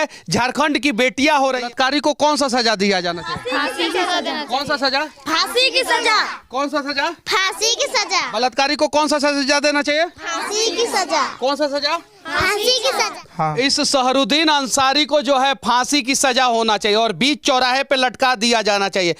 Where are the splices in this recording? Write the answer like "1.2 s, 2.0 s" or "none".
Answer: 1.6 s, 13.2 s

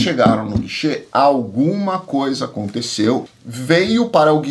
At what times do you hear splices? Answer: 3.2 s

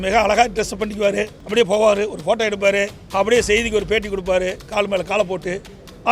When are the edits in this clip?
1.4 s, 3.0 s

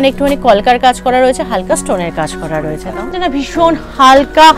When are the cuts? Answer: 3.1 s

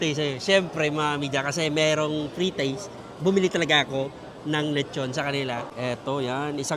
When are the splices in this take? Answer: 5.7 s

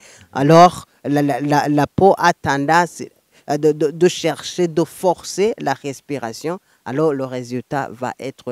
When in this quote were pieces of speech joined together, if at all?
none

